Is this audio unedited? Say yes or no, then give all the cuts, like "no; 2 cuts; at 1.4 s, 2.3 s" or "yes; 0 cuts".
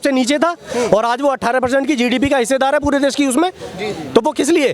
yes; 0 cuts